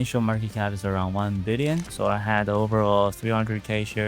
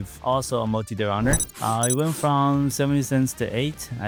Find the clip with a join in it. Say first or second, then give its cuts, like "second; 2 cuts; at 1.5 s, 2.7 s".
first; 1 cut; at 1.9 s